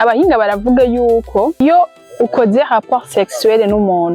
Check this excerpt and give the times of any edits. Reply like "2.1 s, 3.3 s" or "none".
1.6 s